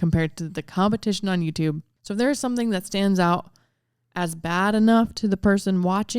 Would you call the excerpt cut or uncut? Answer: cut